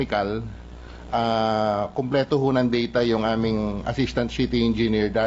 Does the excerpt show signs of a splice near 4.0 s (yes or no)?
no